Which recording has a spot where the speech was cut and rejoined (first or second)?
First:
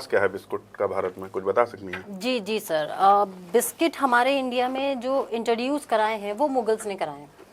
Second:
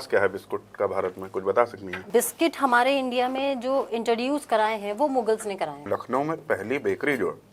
second